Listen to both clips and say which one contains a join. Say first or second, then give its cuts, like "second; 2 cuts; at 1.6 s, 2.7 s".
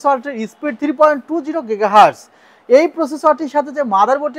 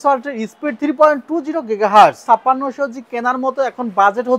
second; 1 cut; at 2.2 s